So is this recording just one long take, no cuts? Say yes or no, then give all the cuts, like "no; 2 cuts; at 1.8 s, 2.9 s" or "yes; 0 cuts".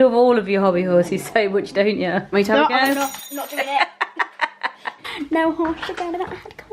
no; 2 cuts; at 2.3 s, 5.0 s